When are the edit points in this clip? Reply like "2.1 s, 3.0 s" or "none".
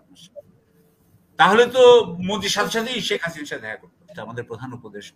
4.2 s

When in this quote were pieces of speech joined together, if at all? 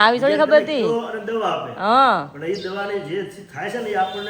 none

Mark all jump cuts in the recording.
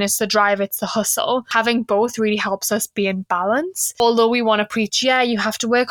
1.5 s, 4.0 s

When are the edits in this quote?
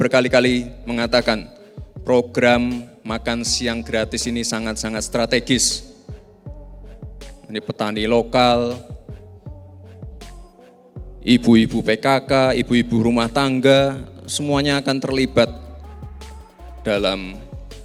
none

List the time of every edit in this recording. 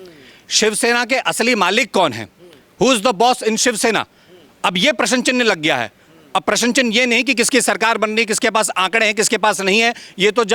none

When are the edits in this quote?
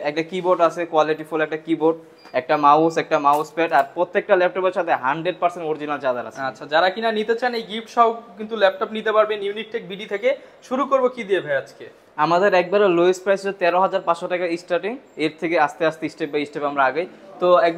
none

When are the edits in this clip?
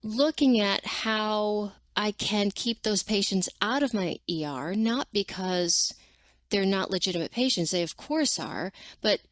1.8 s

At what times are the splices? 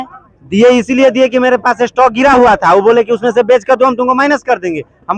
none

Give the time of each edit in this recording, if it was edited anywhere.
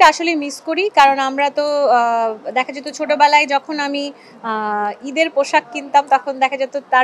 none

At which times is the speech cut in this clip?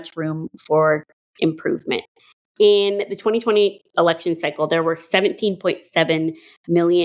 none

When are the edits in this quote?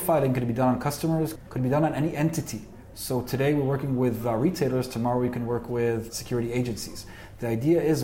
1.3 s, 2.8 s

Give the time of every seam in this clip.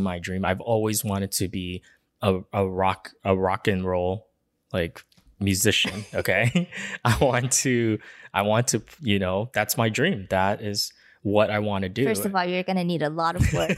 none

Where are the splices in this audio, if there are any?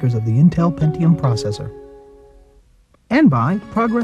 3.1 s

